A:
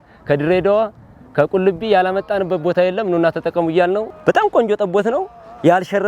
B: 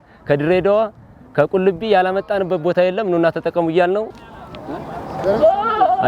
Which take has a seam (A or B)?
A